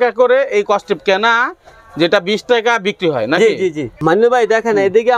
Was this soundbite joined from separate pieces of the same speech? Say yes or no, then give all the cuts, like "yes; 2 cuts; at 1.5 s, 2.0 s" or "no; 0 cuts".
no; 0 cuts